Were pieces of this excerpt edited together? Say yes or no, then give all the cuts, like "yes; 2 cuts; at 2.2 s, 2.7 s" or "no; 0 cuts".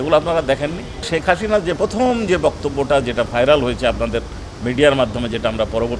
yes; 1 cut; at 1.4 s